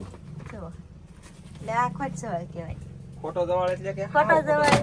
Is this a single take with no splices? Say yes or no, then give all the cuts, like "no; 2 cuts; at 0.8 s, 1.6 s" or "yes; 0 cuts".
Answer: yes; 0 cuts